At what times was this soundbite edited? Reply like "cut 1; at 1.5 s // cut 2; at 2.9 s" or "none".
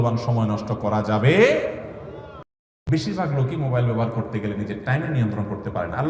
cut 1; at 2.5 s